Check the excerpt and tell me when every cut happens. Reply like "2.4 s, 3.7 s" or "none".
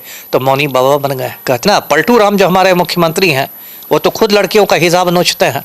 1.6 s